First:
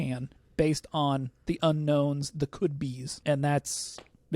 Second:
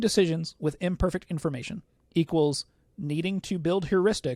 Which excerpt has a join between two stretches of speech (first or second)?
first